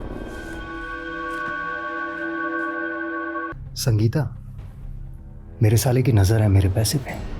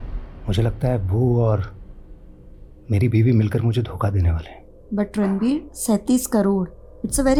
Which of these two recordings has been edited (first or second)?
first